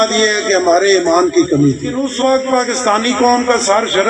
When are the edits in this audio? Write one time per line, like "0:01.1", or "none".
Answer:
0:02.0